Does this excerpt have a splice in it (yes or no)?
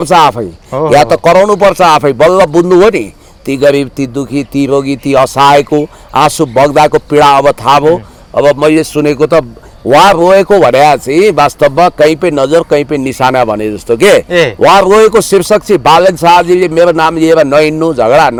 no